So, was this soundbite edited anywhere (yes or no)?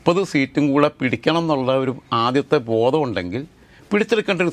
no